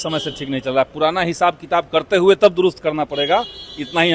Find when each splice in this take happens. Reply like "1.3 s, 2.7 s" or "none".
none